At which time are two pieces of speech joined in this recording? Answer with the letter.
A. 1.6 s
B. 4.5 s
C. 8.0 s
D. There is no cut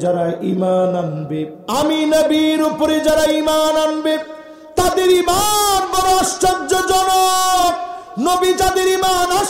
A